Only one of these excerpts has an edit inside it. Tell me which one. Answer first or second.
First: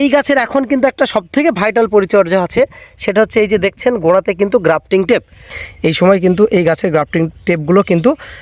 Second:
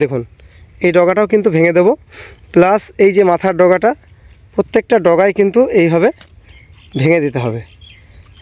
first